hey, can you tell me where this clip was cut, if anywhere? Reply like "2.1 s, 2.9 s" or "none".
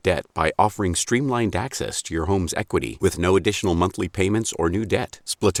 none